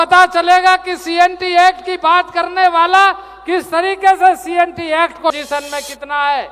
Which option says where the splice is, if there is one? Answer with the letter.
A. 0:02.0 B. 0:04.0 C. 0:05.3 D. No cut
C